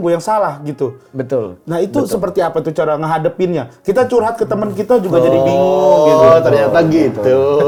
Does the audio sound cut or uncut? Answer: uncut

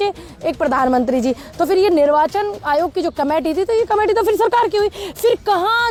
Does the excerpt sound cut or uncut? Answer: uncut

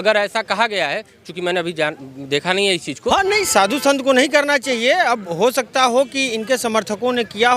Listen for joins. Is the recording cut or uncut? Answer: cut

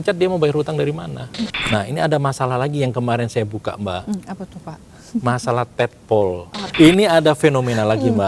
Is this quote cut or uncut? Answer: cut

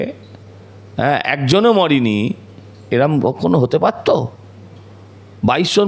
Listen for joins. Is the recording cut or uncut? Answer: uncut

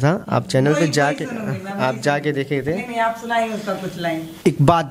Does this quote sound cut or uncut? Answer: uncut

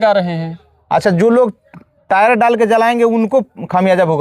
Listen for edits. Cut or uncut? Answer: uncut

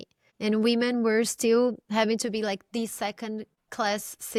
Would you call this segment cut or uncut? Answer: uncut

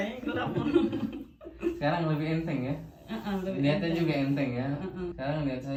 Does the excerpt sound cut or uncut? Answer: uncut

